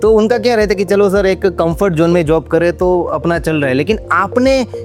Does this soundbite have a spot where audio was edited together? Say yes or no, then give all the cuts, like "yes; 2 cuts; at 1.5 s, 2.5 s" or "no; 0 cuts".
no; 0 cuts